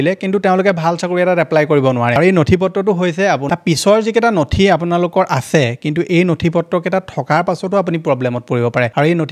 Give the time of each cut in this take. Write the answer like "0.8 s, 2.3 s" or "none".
3.5 s